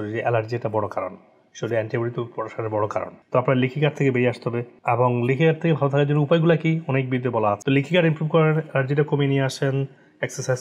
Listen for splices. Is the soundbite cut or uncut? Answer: cut